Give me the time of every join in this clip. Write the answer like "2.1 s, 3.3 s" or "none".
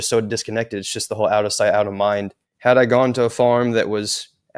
2.5 s